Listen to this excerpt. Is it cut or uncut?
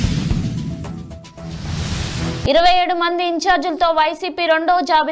uncut